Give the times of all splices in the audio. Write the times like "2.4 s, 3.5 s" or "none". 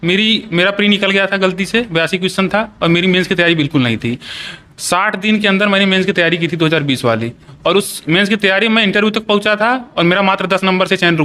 none

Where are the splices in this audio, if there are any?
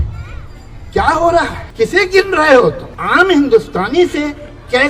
1.6 s, 2.9 s

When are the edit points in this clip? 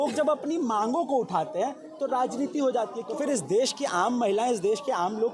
3.0 s

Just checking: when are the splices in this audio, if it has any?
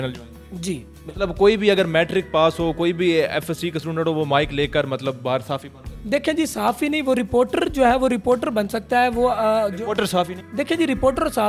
none

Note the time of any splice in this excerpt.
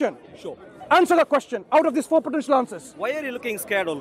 none

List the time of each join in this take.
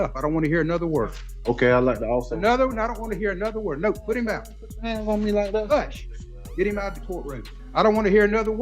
7.5 s

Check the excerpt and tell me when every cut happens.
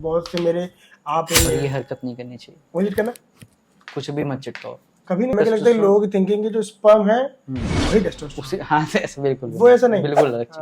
1.4 s, 5.3 s

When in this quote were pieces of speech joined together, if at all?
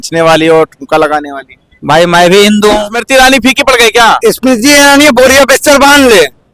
3.0 s

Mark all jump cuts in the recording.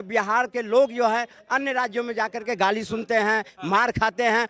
none

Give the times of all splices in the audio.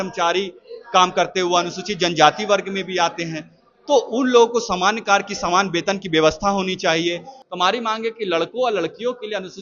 7.4 s

